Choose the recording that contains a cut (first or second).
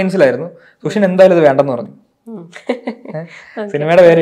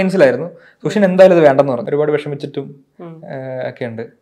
second